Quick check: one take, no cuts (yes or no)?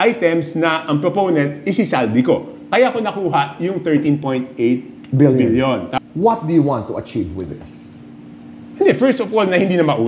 no